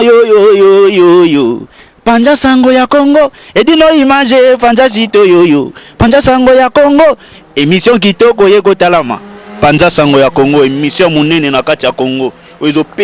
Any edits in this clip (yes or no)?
no